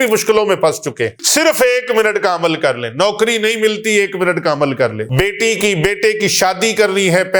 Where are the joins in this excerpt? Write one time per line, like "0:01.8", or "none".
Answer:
0:01.2
0:05.0